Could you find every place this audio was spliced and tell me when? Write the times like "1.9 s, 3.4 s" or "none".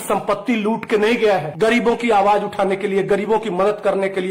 1.5 s